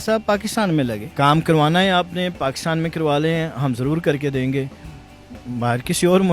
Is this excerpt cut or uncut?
cut